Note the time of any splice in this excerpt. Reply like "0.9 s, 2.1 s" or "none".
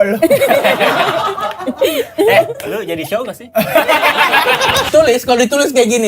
4.9 s